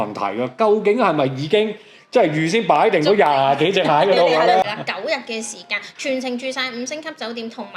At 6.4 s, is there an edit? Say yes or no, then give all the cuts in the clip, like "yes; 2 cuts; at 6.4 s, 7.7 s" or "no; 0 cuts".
no; 1 cut; at 4.6 s